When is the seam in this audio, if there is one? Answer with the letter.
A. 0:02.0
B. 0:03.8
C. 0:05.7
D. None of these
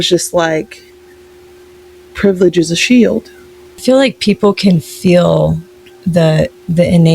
B